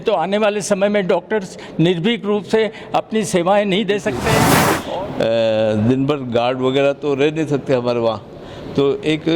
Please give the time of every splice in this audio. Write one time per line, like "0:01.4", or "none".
0:04.7